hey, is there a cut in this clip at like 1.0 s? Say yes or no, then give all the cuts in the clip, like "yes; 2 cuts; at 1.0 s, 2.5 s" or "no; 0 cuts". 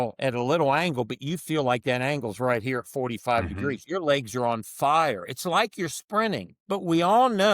no; 1 cut; at 6.5 s